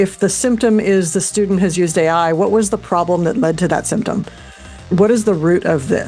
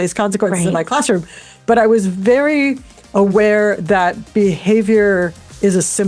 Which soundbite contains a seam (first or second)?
first